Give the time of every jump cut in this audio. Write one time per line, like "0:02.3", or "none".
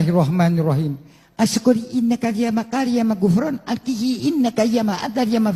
none